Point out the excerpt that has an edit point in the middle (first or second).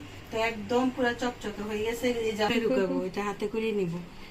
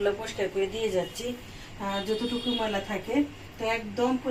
first